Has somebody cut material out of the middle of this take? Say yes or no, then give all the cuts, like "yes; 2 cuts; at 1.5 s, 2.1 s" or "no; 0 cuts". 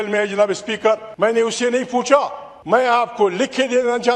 yes; 2 cuts; at 1.1 s, 2.8 s